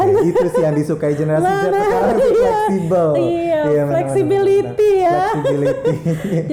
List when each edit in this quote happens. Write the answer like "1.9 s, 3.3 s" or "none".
none